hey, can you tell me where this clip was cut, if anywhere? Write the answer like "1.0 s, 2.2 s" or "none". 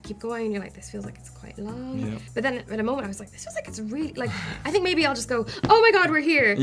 2.2 s